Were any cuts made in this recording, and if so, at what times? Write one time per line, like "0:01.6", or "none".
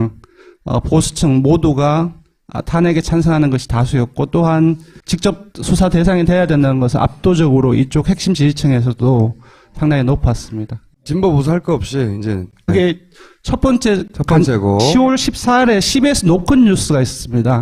none